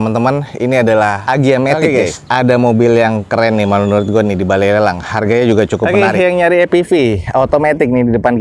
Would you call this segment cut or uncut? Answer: cut